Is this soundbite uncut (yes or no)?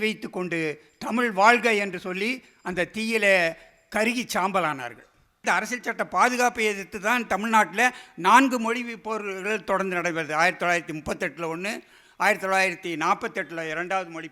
no